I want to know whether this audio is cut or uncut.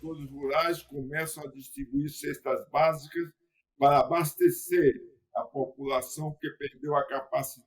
uncut